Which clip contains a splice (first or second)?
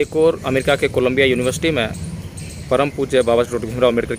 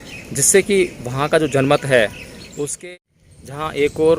second